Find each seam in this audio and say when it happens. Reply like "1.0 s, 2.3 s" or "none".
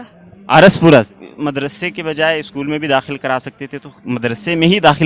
none